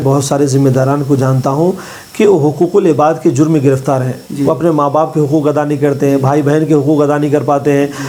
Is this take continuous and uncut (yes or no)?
yes